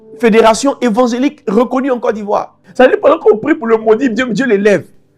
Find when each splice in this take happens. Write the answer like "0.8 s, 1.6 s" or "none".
2.6 s